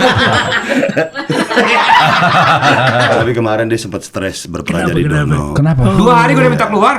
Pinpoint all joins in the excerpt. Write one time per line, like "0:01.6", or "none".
0:03.1

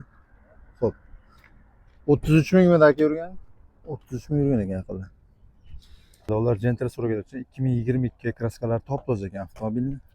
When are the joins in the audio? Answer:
0:06.3

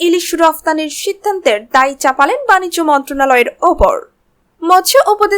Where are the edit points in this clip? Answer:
none

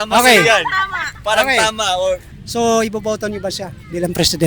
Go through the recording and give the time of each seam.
0:02.4

